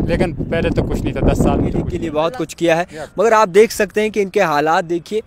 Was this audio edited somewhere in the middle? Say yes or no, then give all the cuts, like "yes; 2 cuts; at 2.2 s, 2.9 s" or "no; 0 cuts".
yes; 1 cut; at 2.0 s